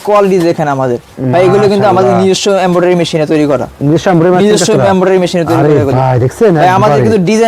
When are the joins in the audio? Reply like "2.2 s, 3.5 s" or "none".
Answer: none